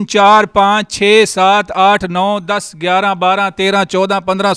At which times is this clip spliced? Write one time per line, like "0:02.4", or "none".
none